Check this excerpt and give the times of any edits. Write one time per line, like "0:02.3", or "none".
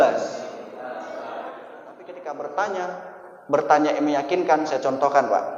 0:02.2

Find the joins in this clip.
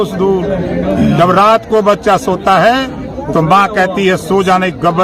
none

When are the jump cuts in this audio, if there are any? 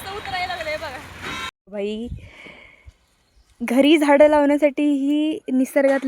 0:01.5

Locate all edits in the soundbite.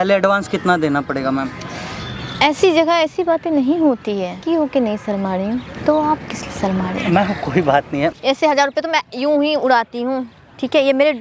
0:04.4
0:08.2

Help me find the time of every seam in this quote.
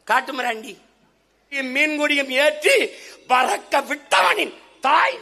0:01.6

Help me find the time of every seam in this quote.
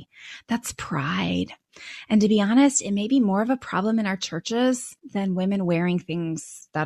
0:05.0

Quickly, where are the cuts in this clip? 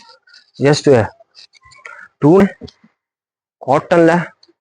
0:02.4

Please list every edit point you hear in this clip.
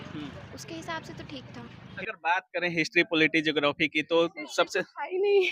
0:01.8

